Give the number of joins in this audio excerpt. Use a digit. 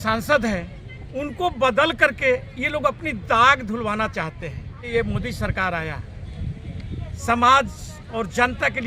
1